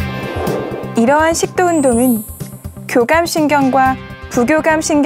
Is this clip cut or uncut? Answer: cut